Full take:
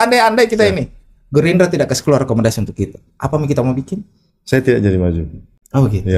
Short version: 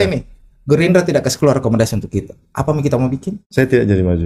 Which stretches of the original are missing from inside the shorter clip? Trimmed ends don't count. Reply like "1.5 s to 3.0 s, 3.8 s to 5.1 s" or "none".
4.0 s to 4.3 s